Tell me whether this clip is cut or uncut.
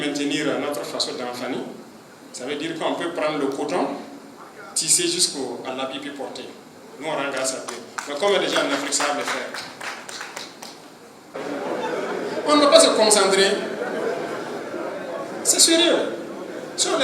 cut